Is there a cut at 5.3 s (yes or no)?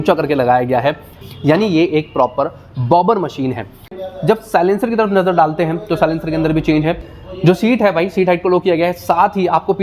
no